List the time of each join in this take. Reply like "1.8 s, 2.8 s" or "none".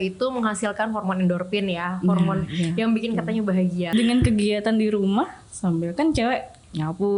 3.9 s